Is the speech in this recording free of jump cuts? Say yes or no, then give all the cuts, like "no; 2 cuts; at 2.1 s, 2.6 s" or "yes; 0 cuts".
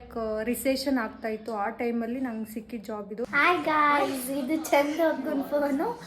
no; 1 cut; at 3.2 s